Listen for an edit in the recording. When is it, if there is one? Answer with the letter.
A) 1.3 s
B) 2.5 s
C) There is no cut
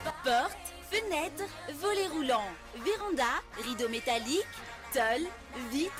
C